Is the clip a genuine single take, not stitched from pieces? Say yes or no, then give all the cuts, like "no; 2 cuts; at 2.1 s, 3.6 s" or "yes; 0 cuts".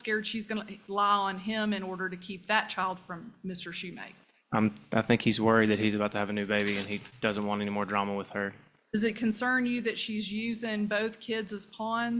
yes; 0 cuts